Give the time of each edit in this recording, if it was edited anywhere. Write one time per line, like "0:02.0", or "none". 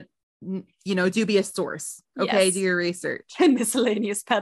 0:03.2